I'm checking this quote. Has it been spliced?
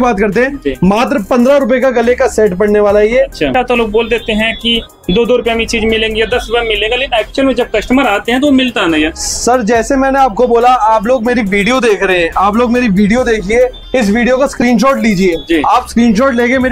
yes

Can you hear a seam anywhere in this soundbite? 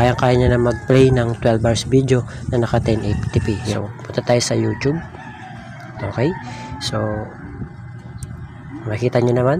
yes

